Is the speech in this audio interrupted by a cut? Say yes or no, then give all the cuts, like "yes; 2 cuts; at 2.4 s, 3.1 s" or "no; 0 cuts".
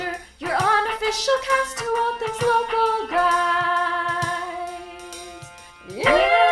no; 0 cuts